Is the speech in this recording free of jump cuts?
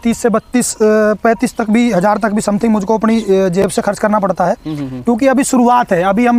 yes; 0 cuts

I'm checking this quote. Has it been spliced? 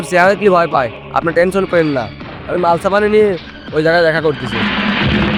no; 0 cuts

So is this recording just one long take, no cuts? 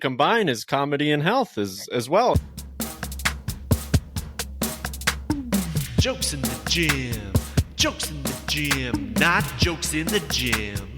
no; 1 cut; at 2.3 s

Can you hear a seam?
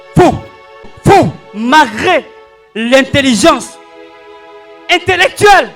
yes; 1 cut; at 0.9 s

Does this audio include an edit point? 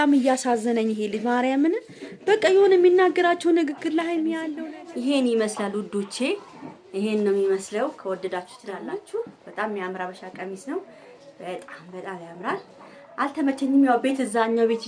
yes; 2 cuts; at 4.4 s, 8.8 s

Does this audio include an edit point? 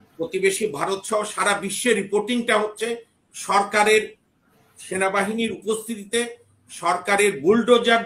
no; 0 cuts

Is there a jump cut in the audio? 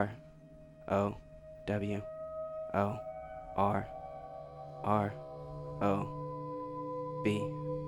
no; 0 cuts

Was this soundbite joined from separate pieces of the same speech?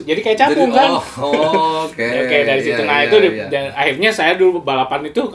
no; 0 cuts

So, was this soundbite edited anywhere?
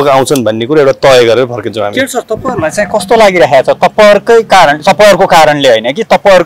no; 0 cuts

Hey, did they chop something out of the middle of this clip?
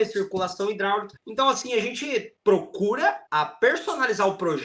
yes; 3 cuts; at 1.2 s, 2.3 s, 3.2 s

